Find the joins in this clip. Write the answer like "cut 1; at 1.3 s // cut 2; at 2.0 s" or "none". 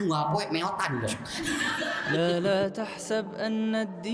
cut 1; at 2.2 s